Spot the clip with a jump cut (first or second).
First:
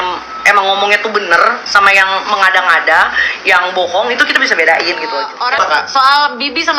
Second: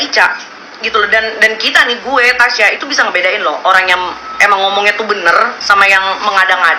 first